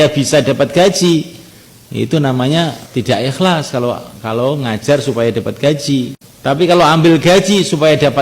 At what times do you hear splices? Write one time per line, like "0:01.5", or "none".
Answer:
0:02.8
0:06.2